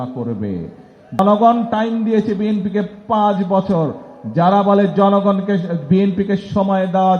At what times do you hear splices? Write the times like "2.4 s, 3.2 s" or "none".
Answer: 1.2 s